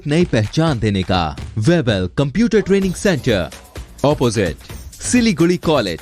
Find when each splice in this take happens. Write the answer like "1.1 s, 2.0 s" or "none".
1.4 s